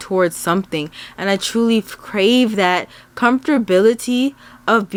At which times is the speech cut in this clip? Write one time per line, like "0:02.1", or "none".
none